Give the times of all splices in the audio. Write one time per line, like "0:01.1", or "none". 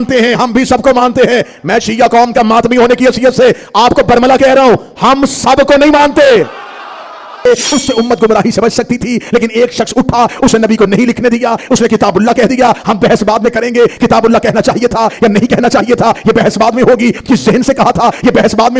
0:07.5